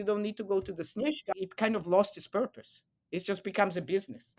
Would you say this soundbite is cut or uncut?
cut